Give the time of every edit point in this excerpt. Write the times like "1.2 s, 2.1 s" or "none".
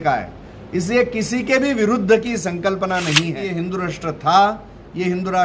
3.5 s